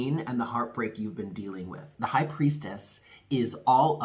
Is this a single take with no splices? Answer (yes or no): no